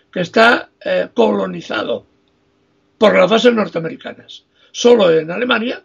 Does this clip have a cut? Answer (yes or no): no